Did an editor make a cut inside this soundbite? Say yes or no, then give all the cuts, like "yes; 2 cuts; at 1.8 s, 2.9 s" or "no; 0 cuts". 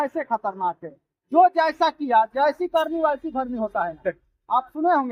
no; 0 cuts